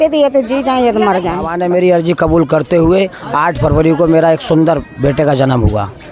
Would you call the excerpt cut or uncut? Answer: cut